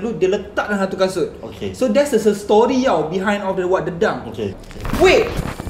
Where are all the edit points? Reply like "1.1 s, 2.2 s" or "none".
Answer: 4.6 s